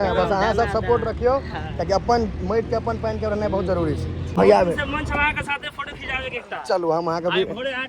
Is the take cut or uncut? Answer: cut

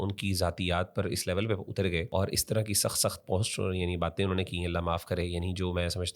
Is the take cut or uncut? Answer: cut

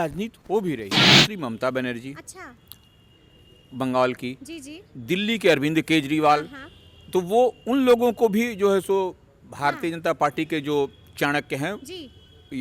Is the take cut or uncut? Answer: cut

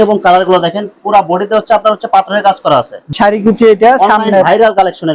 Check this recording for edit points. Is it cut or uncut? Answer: cut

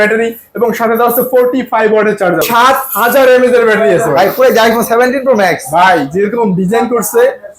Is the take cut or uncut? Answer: cut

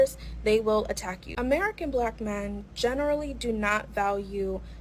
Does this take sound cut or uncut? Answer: cut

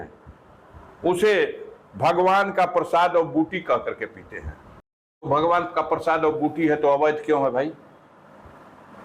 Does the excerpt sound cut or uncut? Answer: cut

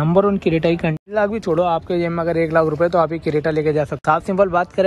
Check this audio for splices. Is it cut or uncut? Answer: cut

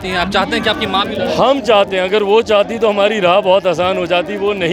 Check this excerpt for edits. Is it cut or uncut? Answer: uncut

